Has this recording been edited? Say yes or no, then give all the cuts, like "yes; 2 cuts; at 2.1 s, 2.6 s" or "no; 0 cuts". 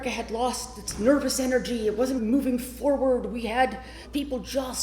yes; 2 cuts; at 2.2 s, 4.0 s